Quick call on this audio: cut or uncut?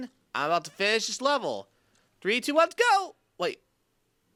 uncut